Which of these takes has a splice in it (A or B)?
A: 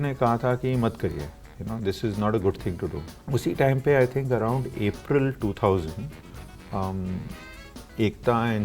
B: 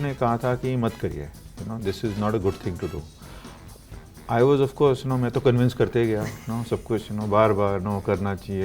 A